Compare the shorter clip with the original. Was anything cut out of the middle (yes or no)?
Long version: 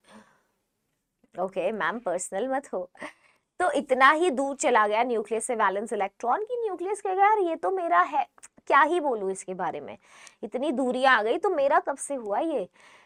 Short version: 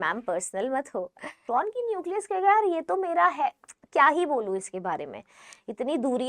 yes